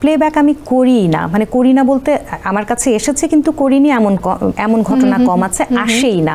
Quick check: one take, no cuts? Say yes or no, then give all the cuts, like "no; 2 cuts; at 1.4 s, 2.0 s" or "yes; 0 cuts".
yes; 0 cuts